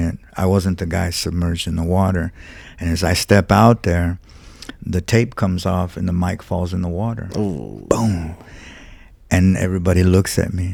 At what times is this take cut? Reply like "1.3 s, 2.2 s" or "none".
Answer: none